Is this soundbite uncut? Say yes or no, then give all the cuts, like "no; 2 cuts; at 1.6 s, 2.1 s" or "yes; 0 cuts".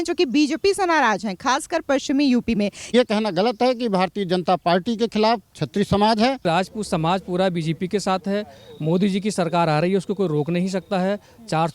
no; 2 cuts; at 2.9 s, 6.4 s